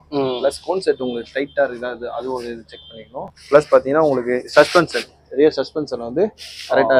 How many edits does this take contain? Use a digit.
1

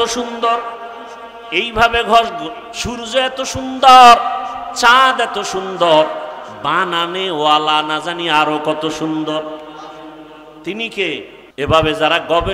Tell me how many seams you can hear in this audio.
1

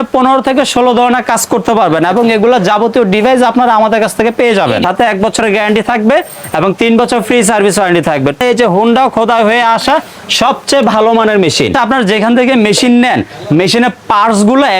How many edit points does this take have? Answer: 3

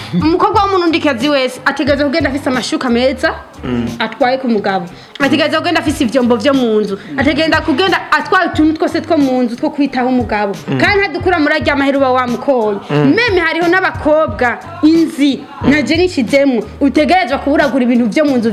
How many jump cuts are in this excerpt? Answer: 0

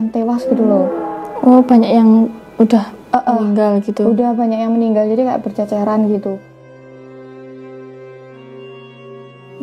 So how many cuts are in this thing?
0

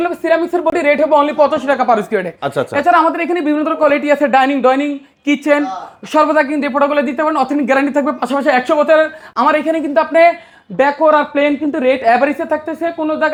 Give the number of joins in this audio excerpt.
0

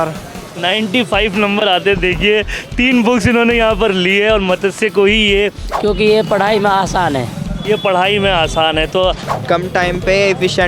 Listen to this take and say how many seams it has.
2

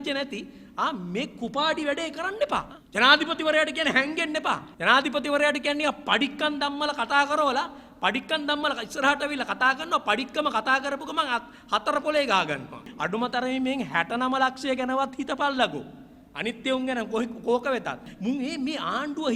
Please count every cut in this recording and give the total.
4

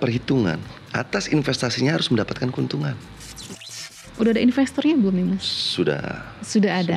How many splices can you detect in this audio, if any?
1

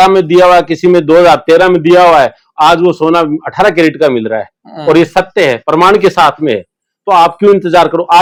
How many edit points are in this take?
0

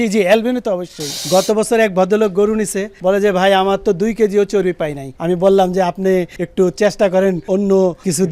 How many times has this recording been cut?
1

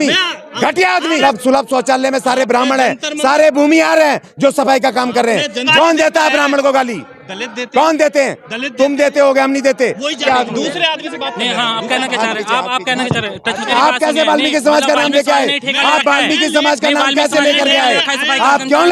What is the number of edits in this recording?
4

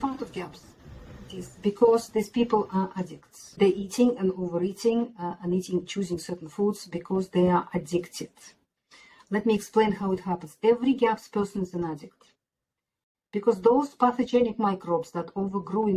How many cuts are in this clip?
1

